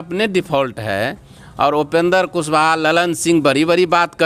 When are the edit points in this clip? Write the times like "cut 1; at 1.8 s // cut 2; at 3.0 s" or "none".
none